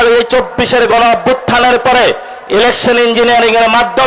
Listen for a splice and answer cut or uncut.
uncut